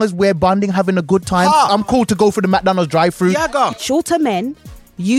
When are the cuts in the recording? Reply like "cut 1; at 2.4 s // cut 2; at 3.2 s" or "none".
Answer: cut 1; at 1.8 s // cut 2; at 3.7 s